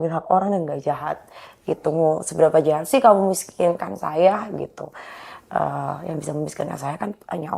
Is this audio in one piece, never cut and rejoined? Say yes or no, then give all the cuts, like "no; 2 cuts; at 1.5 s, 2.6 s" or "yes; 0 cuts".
yes; 0 cuts